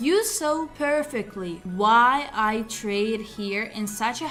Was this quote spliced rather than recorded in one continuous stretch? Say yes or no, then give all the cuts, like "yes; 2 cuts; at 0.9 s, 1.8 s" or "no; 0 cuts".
no; 0 cuts